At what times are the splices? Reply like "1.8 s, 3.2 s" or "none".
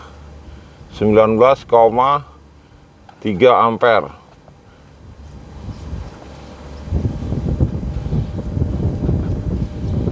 none